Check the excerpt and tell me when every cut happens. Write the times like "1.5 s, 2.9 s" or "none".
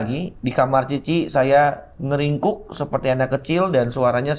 none